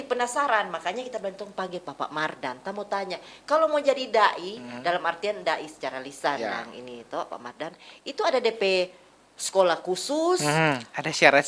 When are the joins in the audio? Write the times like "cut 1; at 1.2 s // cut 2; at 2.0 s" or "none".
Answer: none